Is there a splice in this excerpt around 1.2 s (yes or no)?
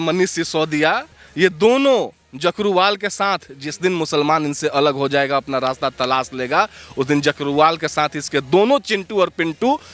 yes